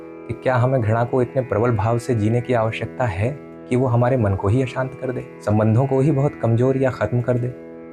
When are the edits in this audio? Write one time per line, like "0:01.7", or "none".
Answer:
0:05.3